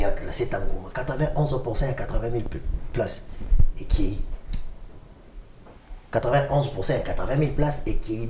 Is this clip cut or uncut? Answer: uncut